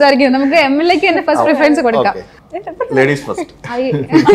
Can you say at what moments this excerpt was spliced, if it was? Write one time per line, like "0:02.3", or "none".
0:02.3